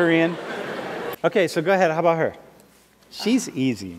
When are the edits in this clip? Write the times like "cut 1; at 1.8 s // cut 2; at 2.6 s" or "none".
cut 1; at 1.0 s

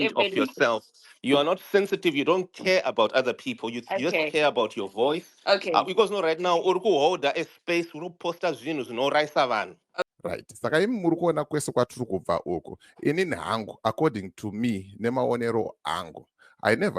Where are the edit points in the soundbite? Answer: cut 1; at 10.0 s

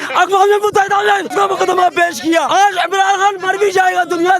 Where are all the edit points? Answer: cut 1; at 1.3 s // cut 2; at 2.5 s

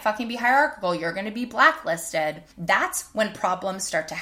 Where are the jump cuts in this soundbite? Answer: cut 1; at 2.5 s

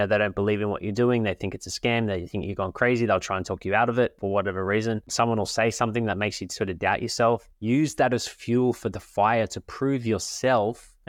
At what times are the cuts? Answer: cut 1; at 4.2 s // cut 2; at 5.1 s // cut 3; at 7.5 s

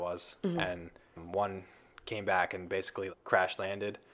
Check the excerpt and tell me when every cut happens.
cut 1; at 3.2 s

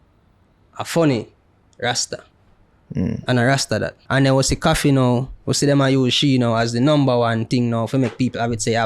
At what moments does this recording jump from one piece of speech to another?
cut 1; at 4.0 s

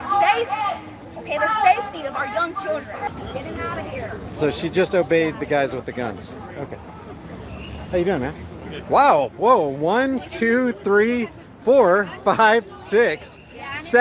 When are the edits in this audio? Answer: cut 1; at 3.1 s

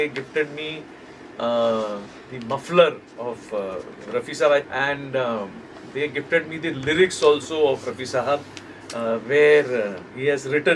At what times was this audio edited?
cut 1; at 4.7 s

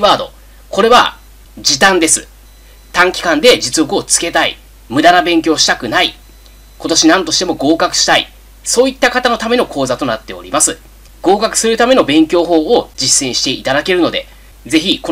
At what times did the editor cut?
cut 1; at 13.0 s

